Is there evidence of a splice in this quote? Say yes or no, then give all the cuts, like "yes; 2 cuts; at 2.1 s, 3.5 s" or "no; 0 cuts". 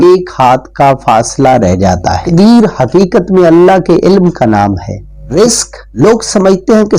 yes; 2 cuts; at 2.3 s, 5.2 s